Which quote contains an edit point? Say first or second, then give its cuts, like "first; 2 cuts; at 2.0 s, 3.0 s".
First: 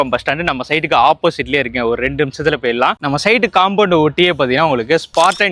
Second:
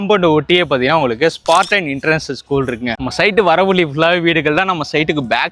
second; 1 cut; at 2.9 s